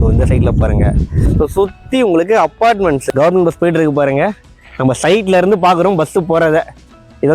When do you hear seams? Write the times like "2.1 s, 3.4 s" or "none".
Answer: 3.0 s